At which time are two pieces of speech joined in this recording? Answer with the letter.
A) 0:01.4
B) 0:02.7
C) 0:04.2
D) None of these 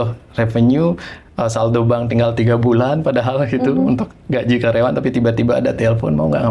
D